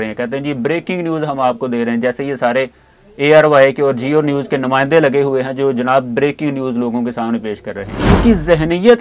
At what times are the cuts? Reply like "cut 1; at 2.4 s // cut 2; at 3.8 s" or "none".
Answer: cut 1; at 8.0 s